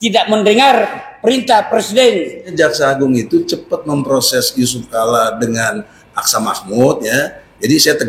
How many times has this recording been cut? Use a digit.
1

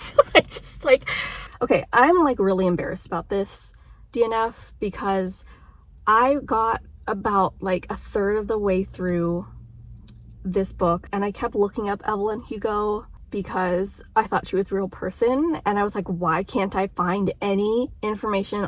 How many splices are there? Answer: 1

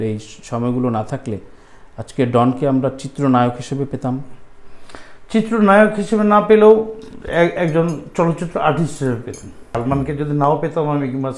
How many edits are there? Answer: 1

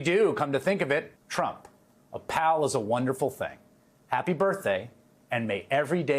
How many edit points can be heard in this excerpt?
1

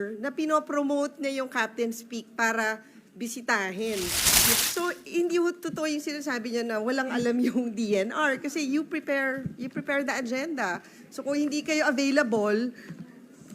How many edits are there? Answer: 1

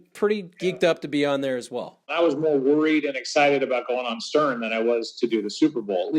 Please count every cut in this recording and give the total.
1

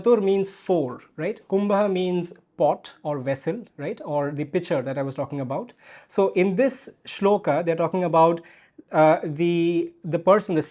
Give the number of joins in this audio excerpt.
0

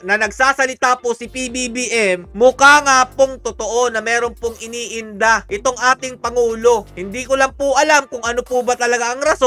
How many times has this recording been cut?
0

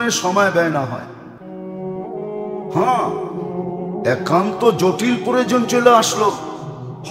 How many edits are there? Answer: 0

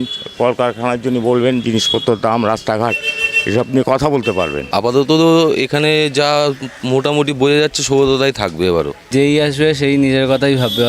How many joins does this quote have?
2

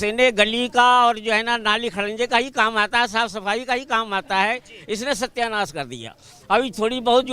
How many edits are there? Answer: 0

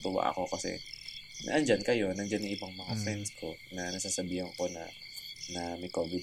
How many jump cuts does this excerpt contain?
0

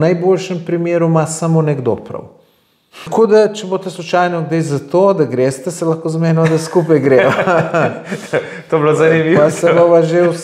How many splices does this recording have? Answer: 1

